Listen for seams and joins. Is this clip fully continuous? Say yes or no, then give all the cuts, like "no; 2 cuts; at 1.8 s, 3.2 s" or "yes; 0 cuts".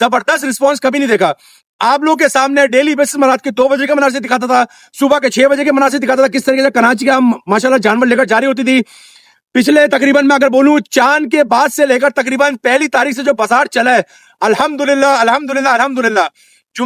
yes; 0 cuts